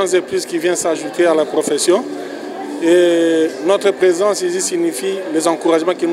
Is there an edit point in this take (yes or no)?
no